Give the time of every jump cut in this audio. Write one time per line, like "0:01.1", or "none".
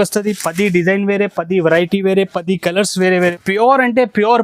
0:03.3

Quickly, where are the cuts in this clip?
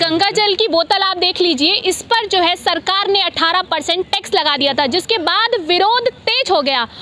none

